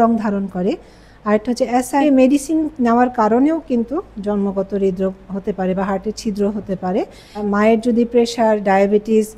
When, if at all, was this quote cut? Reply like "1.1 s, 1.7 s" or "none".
2.0 s, 7.4 s